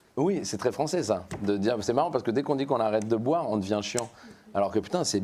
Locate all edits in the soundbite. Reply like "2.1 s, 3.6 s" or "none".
none